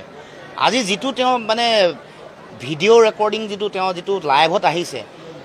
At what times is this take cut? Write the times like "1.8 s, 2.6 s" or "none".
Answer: none